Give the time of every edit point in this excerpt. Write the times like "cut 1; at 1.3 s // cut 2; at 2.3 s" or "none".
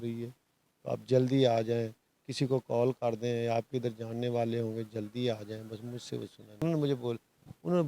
cut 1; at 6.6 s